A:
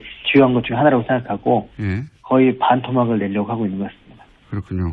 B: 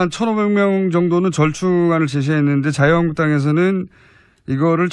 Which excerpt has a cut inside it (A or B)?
B